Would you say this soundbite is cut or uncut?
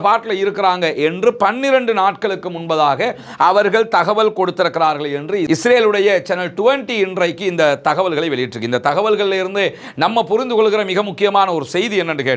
uncut